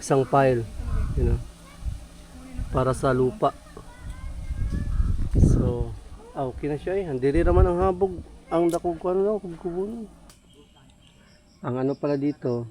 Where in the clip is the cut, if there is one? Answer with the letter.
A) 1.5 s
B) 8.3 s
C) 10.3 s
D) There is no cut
C